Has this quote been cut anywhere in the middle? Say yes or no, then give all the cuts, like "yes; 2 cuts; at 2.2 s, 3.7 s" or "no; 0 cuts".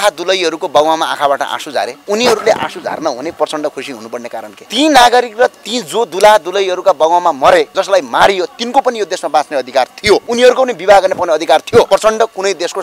yes; 5 cuts; at 2.0 s, 4.6 s, 7.7 s, 10.3 s, 11.9 s